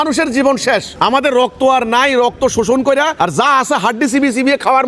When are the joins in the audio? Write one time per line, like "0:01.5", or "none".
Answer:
none